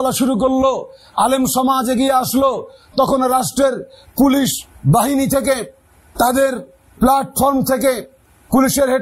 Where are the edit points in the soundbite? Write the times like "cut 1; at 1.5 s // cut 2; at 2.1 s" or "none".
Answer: cut 1; at 4.7 s

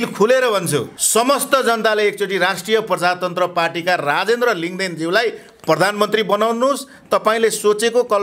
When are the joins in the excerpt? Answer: cut 1; at 1.0 s

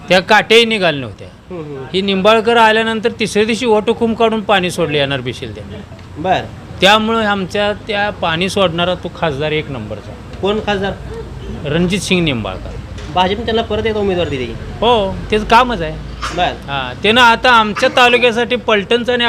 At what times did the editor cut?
none

